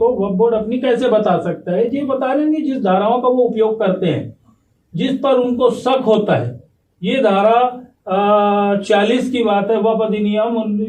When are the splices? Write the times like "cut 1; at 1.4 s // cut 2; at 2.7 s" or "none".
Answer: none